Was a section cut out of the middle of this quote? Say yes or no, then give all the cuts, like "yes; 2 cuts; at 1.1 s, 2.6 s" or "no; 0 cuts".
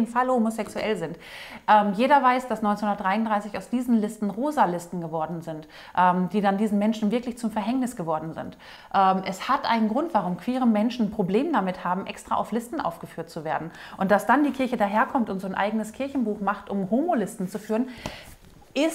no; 0 cuts